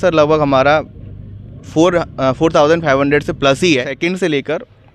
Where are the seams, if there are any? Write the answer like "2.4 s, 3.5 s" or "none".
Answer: 4.0 s